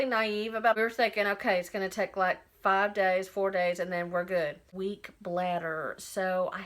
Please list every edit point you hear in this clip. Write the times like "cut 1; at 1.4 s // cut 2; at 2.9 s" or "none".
cut 1; at 0.7 s // cut 2; at 4.6 s